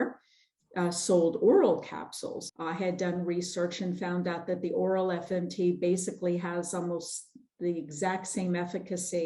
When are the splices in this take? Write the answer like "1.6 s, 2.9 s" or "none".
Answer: 2.4 s